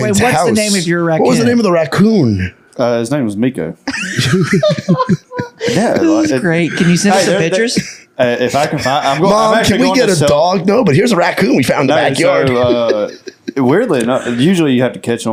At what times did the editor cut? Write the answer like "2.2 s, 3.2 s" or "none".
none